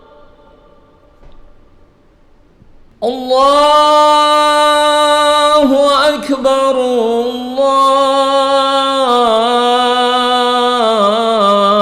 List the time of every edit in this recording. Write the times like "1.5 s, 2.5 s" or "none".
2.9 s